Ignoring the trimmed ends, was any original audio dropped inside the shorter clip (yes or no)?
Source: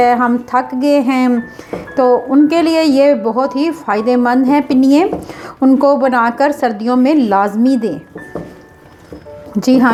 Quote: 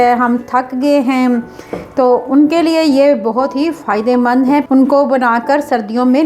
yes